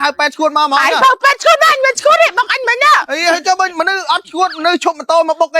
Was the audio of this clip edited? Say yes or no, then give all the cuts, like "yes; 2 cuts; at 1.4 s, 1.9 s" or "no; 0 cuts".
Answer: no; 0 cuts